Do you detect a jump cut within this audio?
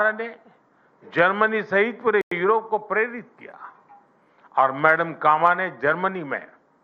no; 0 cuts

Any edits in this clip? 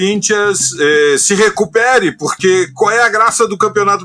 no; 0 cuts

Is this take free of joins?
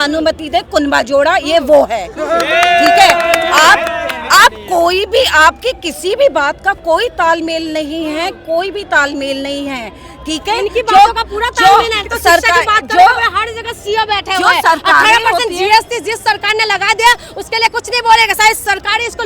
yes; 0 cuts

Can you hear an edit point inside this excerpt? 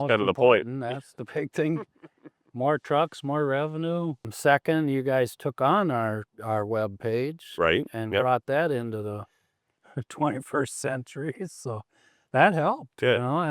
yes; 1 cut; at 4.3 s

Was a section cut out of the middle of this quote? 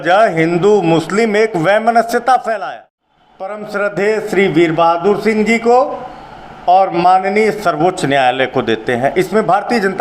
yes; 1 cut; at 2.6 s

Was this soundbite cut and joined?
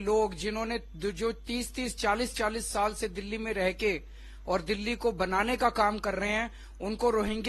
no; 0 cuts

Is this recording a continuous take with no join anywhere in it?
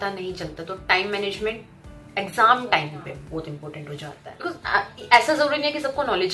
no; 1 cut; at 4.3 s

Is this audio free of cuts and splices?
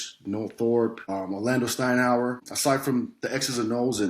no; 2 cuts; at 1.0 s, 2.5 s

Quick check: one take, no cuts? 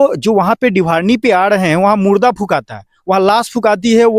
yes; 0 cuts

